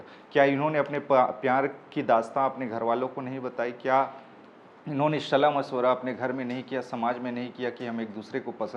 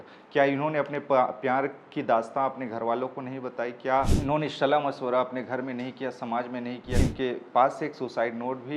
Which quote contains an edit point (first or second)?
second